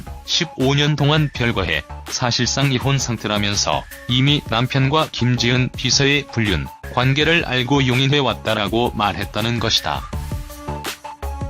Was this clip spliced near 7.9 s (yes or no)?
yes